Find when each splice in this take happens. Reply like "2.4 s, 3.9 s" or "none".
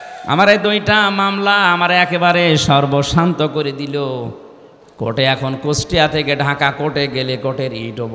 none